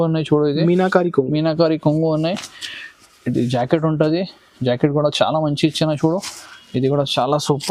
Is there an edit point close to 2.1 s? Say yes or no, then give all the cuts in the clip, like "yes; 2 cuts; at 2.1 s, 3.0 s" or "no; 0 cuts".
no; 0 cuts